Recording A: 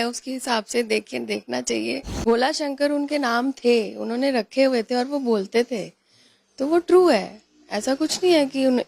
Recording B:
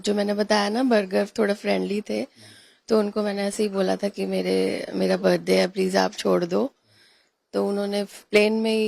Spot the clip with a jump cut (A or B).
A